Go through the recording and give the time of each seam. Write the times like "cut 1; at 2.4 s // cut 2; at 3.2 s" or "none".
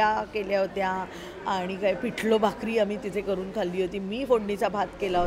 none